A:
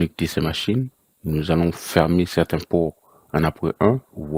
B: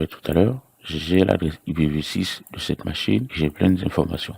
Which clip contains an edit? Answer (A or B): B